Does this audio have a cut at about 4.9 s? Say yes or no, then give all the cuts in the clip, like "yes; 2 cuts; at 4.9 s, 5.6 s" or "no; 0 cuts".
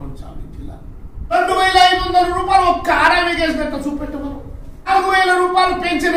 yes; 2 cuts; at 1.3 s, 4.9 s